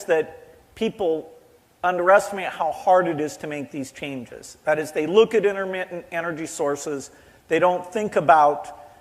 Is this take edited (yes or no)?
yes